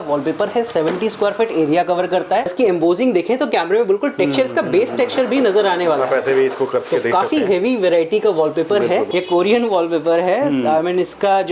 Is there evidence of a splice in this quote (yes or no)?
yes